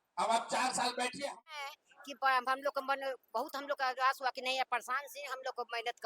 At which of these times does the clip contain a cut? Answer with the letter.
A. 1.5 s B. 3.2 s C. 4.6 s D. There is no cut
A